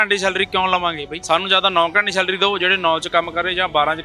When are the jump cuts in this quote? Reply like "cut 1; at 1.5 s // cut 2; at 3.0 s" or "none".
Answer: cut 1; at 1.1 s